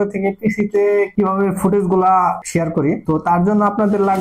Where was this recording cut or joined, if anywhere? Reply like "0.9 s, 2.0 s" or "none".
2.4 s